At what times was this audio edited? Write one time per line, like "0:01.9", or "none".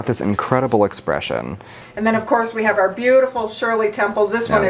0:01.8